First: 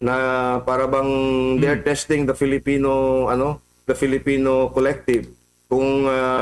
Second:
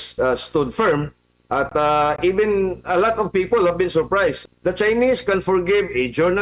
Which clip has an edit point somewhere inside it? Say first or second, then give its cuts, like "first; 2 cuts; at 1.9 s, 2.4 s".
second; 1 cut; at 4.4 s